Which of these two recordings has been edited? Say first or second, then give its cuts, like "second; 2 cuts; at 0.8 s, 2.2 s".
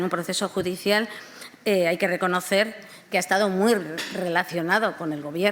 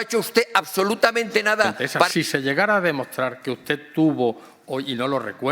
second; 1 cut; at 2.1 s